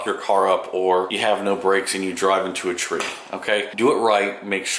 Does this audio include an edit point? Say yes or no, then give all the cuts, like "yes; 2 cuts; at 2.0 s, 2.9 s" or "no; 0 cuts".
yes; 2 cuts; at 1.1 s, 3.7 s